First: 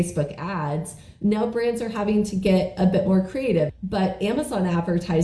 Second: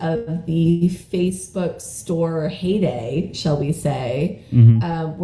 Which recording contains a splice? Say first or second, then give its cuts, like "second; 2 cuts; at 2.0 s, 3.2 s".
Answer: first; 1 cut; at 3.7 s